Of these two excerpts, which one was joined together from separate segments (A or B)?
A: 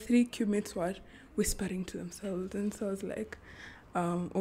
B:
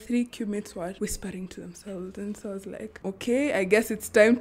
B